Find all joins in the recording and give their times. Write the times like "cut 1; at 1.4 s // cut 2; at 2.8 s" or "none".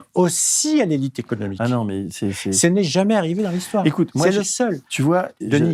none